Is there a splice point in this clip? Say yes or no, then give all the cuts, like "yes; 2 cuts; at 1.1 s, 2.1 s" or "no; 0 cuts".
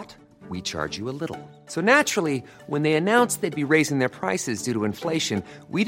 no; 0 cuts